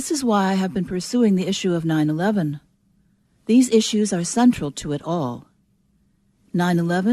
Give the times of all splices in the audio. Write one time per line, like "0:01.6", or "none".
0:05.1